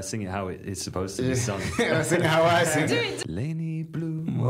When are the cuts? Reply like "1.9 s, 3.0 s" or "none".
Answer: 3.2 s